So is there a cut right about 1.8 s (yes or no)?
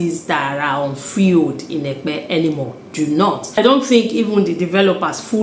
no